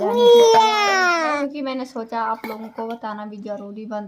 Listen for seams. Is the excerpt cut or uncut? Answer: cut